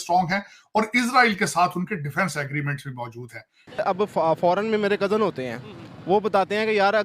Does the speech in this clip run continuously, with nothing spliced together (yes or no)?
no